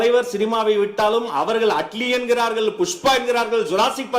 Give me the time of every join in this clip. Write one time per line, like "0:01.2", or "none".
none